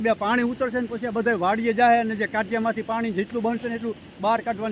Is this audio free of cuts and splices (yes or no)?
yes